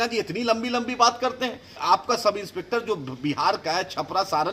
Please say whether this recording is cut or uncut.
cut